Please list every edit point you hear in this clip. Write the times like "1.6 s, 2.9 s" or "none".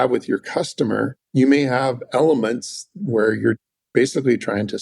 1.2 s